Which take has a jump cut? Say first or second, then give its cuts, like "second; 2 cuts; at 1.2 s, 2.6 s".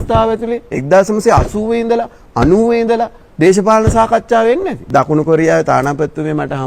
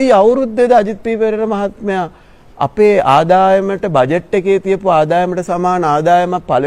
first; 2 cuts; at 3.2 s, 4.8 s